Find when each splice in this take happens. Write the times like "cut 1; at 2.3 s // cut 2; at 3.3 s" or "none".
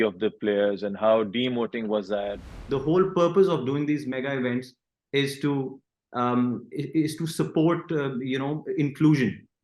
cut 1; at 2.5 s

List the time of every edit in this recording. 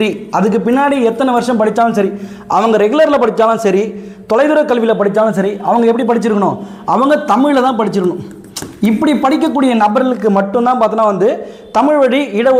none

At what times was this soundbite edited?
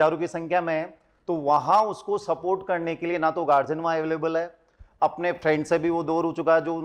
none

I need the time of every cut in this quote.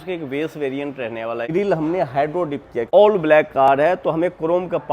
cut 1; at 1.5 s // cut 2; at 2.9 s

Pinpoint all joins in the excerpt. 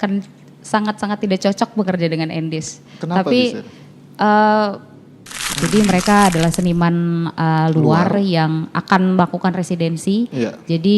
cut 1; at 5.5 s

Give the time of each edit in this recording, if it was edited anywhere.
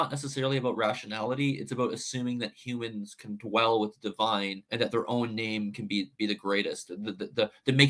cut 1; at 4.6 s

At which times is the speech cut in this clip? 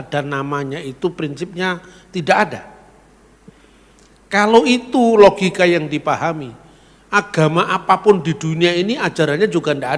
none

